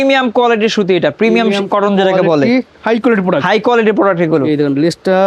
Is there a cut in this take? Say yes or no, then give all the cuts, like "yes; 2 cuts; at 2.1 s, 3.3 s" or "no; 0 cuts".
no; 0 cuts